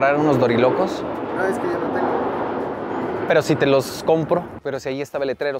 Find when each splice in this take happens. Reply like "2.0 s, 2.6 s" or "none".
4.5 s